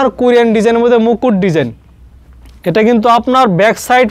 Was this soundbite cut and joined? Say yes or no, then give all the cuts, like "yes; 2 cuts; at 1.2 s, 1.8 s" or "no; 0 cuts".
no; 0 cuts